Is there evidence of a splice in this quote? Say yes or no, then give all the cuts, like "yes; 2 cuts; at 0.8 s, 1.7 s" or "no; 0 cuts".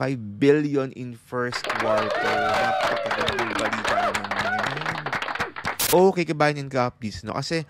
yes; 2 cuts; at 1.7 s, 5.8 s